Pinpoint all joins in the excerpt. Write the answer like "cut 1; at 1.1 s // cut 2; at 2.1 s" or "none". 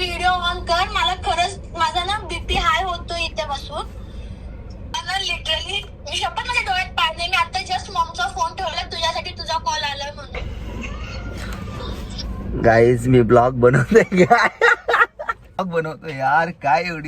cut 1; at 4.9 s // cut 2; at 10.4 s